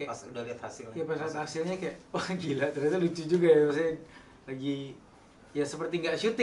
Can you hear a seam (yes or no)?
no